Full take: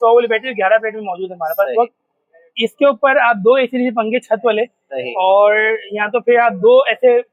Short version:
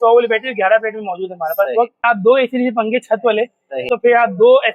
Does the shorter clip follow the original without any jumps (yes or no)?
no